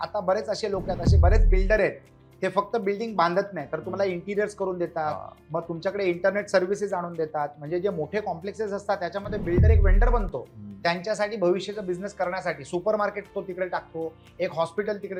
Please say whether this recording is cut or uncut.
uncut